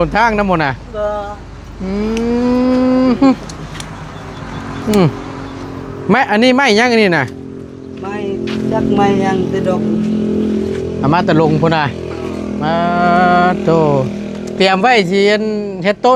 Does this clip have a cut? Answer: no; 0 cuts

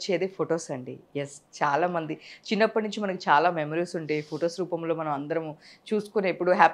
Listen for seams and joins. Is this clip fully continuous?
yes; 0 cuts

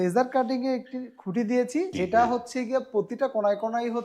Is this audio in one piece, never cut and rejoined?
no; 1 cut; at 1.9 s

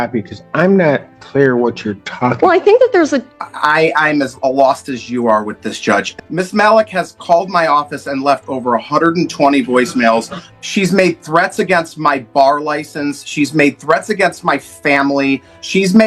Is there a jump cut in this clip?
yes; 3 cuts; at 3.3 s, 6.1 s, 10.4 s

